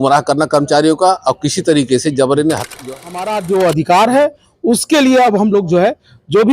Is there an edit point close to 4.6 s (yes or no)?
no